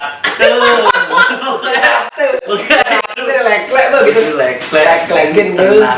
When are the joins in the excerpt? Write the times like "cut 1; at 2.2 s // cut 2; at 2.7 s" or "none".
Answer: none